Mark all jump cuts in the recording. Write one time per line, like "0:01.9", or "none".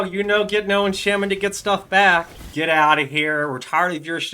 0:02.5